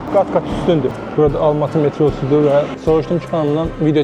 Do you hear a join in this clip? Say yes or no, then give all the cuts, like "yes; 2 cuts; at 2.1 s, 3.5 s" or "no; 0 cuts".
yes; 2 cuts; at 1.0 s, 2.7 s